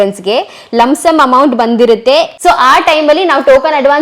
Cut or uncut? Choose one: cut